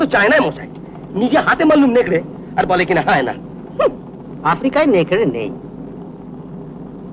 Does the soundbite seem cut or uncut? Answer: uncut